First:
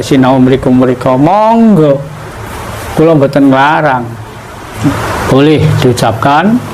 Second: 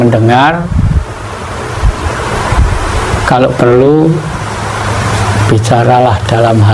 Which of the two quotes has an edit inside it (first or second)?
first